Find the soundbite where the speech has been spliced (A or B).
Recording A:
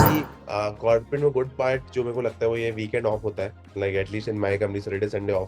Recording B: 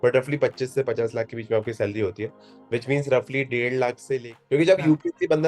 B